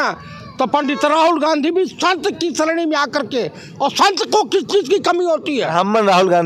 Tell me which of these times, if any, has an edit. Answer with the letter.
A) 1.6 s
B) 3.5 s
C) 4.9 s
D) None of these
D